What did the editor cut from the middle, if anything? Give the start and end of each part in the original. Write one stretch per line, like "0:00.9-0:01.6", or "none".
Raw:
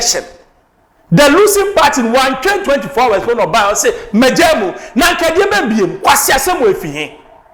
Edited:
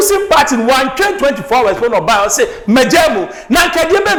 none